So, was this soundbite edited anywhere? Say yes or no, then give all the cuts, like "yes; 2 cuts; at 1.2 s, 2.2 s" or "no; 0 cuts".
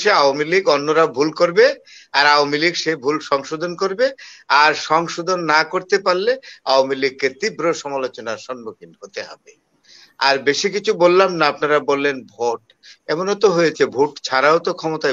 no; 0 cuts